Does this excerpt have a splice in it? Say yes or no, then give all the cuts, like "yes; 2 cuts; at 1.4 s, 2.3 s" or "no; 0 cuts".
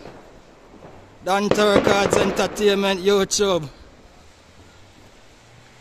no; 0 cuts